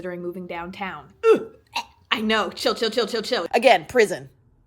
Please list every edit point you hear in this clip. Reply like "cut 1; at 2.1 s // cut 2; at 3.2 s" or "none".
cut 1; at 3.4 s